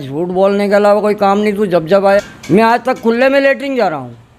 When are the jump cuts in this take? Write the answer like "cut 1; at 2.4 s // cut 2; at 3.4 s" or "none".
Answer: cut 1; at 2.2 s